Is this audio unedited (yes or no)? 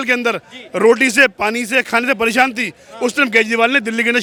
yes